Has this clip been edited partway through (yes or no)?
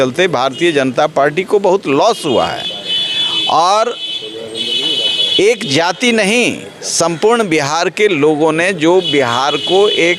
no